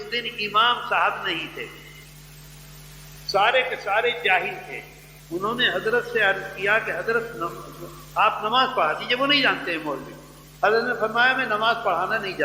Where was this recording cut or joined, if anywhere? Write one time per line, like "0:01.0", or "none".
none